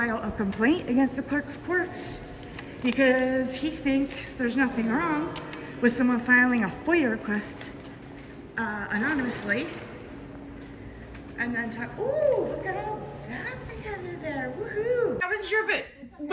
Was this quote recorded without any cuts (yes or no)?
no